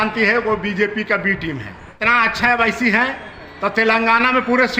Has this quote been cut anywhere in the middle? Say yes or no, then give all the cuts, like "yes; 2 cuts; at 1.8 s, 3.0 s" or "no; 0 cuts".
yes; 1 cut; at 2.0 s